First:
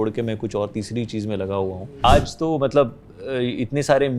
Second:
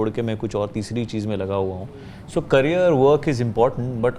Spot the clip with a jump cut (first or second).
first